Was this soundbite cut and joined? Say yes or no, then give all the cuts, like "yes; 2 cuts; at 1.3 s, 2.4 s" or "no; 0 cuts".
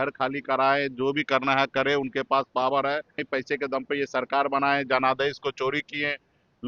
yes; 1 cut; at 3.2 s